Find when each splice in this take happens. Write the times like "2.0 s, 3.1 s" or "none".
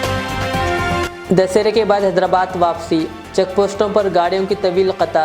1.1 s